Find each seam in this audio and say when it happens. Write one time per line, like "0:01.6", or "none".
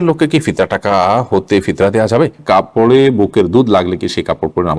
0:02.4